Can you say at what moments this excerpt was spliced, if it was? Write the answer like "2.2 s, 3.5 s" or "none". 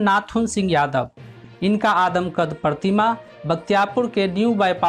1.3 s